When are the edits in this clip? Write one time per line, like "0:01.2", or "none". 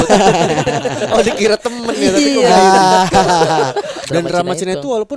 0:04.0